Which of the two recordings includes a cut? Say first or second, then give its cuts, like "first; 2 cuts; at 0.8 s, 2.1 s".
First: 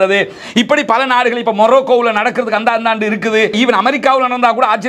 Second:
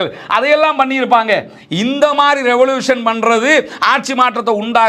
first; 1 cut; at 3.5 s